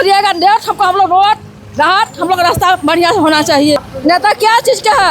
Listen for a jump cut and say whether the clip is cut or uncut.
cut